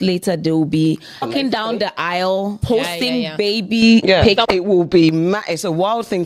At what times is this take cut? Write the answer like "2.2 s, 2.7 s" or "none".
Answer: 1.3 s, 2.6 s, 4.5 s